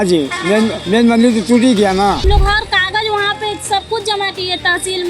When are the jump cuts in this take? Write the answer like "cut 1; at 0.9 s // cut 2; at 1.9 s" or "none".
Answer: cut 1; at 2.2 s